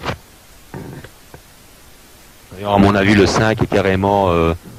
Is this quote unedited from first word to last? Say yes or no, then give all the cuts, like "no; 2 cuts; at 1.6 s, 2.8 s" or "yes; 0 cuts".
yes; 0 cuts